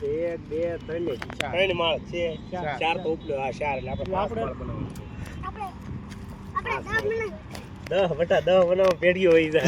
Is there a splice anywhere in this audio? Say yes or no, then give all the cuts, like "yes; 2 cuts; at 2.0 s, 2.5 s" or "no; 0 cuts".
no; 0 cuts